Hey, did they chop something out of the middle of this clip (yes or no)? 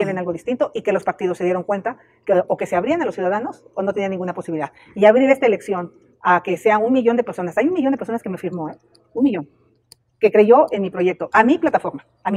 no